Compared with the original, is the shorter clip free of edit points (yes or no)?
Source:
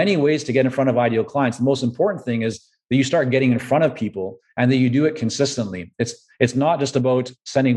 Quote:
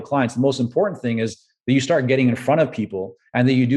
yes